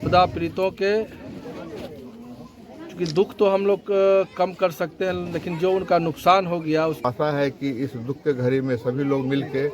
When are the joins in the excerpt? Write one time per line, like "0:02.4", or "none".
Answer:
0:07.0